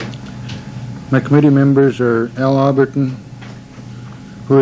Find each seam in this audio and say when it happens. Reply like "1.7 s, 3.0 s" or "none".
1.5 s